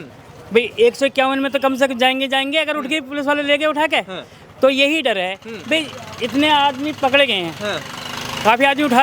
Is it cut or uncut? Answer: uncut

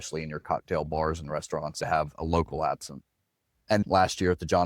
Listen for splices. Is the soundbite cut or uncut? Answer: cut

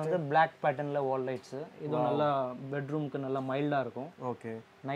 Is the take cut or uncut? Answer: uncut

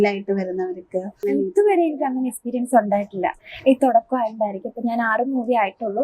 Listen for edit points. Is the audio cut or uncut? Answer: cut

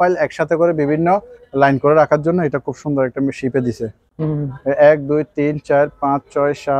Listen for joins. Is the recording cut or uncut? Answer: uncut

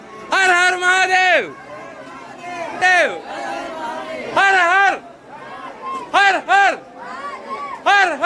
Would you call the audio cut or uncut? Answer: uncut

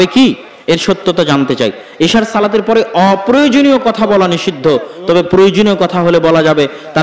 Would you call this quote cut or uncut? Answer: uncut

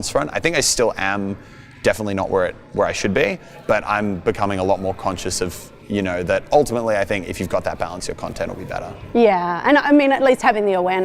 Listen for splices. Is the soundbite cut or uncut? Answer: uncut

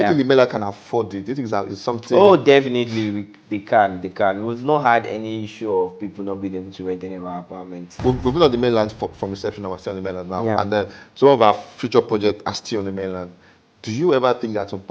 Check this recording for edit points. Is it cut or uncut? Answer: cut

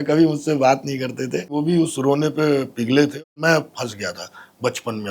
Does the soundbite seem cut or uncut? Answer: cut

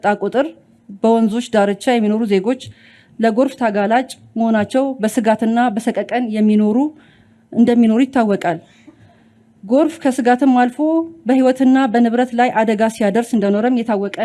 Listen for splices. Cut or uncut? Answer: uncut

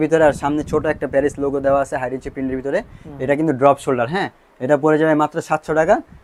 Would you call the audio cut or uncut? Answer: uncut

